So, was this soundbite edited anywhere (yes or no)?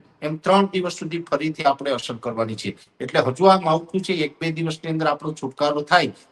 no